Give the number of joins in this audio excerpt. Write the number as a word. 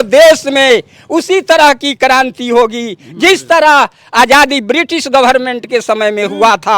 zero